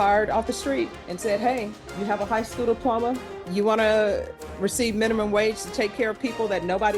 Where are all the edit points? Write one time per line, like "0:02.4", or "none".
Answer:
0:01.0
0:01.8
0:03.3